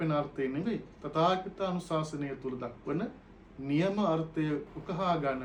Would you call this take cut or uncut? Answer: uncut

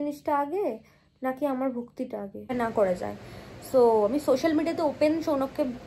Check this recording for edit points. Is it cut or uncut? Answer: cut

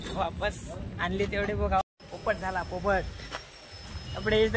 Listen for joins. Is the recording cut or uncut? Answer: cut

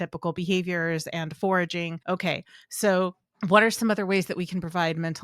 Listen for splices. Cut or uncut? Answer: cut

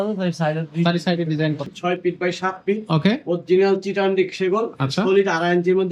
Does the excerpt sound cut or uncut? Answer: cut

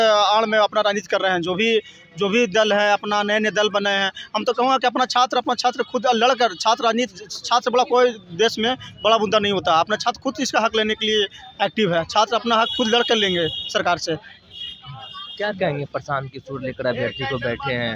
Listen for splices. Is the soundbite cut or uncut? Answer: uncut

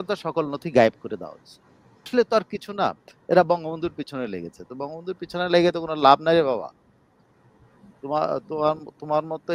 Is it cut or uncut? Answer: cut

